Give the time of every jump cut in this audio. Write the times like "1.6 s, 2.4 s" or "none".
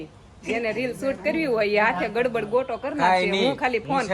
none